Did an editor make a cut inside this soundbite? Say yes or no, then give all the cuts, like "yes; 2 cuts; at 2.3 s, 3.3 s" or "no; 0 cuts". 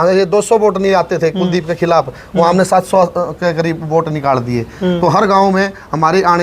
no; 0 cuts